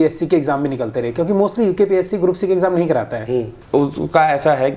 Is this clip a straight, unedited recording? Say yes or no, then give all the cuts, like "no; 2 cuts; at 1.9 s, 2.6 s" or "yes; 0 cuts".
yes; 0 cuts